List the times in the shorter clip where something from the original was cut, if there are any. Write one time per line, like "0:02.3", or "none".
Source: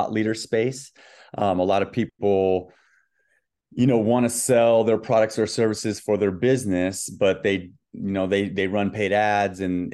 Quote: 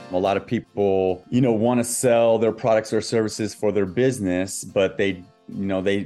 0:01.2